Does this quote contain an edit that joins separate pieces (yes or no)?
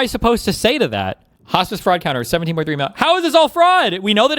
yes